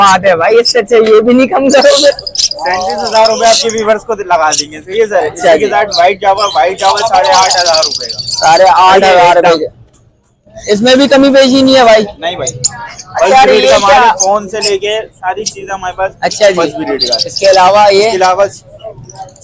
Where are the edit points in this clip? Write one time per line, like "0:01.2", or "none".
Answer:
none